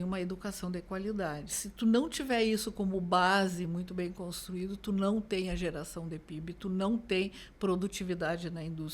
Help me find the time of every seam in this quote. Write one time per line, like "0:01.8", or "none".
0:01.6